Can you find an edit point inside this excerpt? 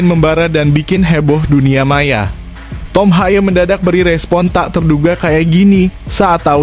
no; 0 cuts

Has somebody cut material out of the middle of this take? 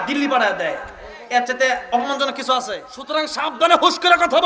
yes; 1 cut; at 2.9 s

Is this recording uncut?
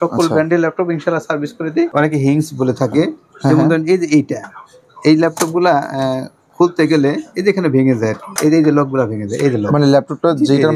no; 2 cuts; at 1.9 s, 8.3 s

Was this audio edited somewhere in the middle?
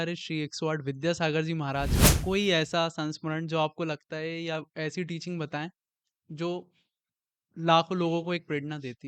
no; 0 cuts

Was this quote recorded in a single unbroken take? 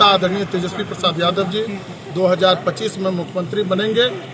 yes; 0 cuts

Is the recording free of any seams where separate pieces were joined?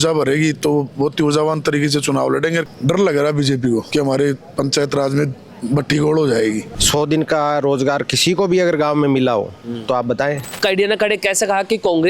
no; 4 cuts; at 2.6 s, 3.9 s, 6.7 s, 10.6 s

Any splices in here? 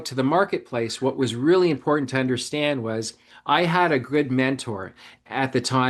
no; 0 cuts

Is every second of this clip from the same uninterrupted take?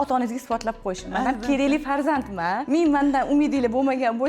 no; 1 cut; at 2.6 s

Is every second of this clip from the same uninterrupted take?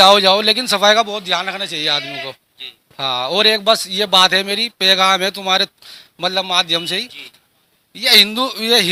yes; 0 cuts

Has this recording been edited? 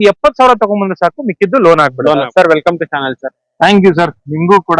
yes; 1 cut; at 2.3 s

